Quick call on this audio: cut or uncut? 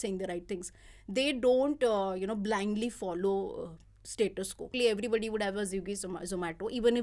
cut